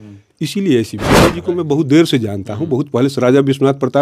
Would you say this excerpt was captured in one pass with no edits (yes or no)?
no